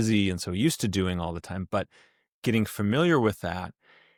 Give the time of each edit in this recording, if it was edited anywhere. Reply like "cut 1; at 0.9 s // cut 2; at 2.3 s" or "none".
none